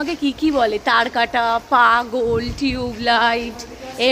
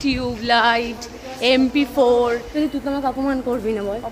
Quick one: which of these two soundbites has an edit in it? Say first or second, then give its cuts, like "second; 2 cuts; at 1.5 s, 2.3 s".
second; 1 cut; at 2.5 s